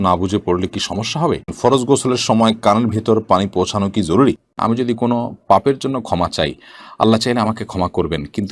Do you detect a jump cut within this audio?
yes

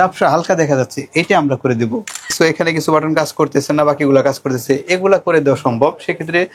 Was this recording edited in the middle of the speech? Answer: yes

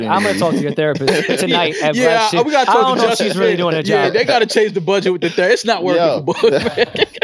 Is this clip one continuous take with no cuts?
yes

